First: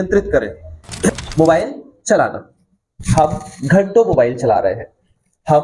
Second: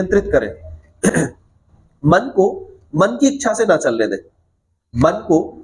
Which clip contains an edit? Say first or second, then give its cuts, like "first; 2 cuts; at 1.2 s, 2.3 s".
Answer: first; 1 cut; at 1.1 s